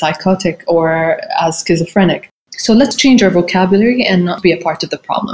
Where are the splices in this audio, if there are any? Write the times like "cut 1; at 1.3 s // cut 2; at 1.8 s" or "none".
cut 1; at 2.9 s // cut 2; at 4.4 s